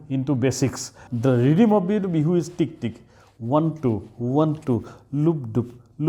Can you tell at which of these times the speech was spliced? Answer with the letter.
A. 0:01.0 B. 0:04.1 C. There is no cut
A